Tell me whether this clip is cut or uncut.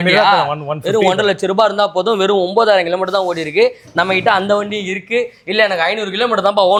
uncut